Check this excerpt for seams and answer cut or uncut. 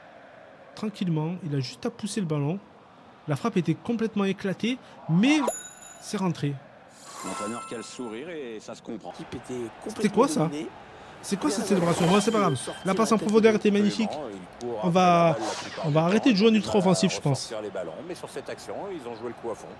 cut